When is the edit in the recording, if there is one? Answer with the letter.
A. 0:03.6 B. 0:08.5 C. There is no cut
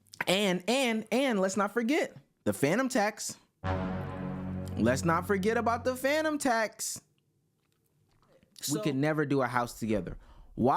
B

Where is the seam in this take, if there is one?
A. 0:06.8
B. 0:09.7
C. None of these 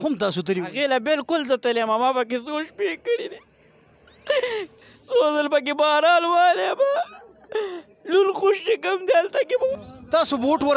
B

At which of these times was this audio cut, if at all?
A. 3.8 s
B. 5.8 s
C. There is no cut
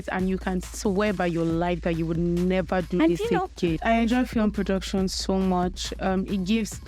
A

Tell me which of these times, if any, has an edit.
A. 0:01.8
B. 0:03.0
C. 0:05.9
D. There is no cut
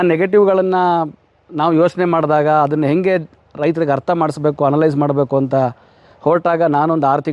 D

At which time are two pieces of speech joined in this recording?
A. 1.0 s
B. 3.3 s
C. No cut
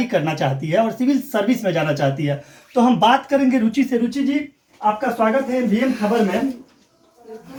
C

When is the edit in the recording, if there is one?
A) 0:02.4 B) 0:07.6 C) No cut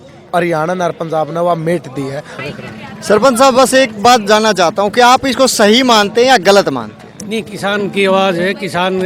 A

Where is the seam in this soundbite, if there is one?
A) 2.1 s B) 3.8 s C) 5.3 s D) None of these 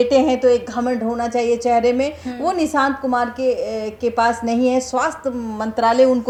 D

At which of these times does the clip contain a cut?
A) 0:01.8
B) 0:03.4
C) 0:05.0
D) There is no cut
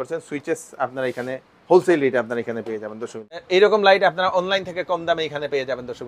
B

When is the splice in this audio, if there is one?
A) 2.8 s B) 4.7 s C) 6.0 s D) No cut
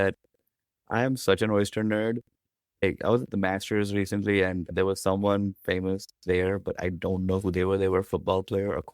A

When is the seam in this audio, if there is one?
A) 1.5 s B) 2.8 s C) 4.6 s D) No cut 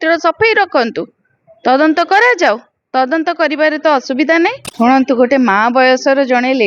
C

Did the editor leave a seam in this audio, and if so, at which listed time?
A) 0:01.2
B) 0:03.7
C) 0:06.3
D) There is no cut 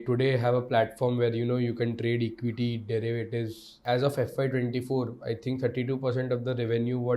B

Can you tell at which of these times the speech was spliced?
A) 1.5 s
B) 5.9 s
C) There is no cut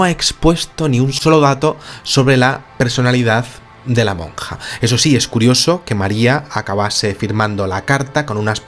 B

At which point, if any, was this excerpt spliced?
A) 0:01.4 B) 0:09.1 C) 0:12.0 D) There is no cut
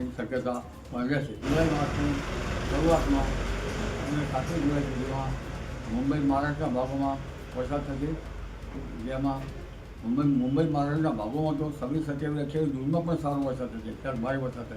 A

